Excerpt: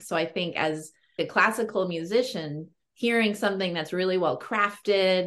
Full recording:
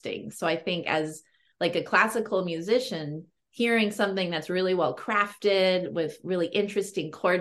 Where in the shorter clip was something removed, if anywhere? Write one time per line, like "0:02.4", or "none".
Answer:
0:01.2